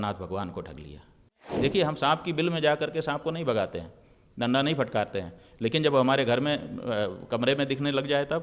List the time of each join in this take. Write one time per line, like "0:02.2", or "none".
0:01.5